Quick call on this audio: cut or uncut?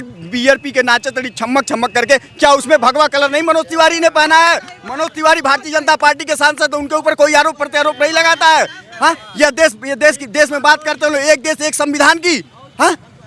uncut